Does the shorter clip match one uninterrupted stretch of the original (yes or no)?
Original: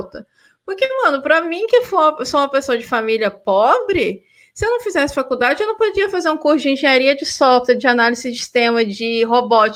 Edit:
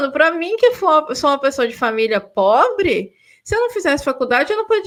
yes